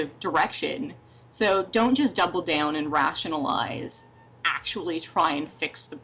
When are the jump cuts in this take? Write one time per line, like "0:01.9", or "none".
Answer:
none

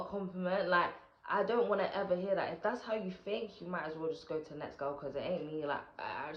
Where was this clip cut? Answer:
none

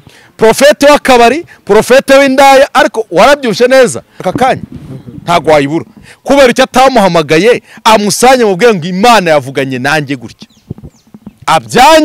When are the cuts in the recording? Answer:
0:04.3

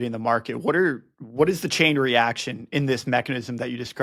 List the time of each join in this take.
none

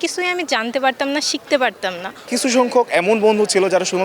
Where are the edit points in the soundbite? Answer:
0:02.3

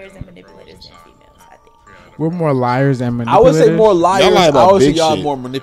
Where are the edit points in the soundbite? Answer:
none

